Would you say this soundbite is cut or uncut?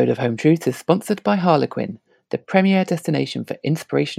uncut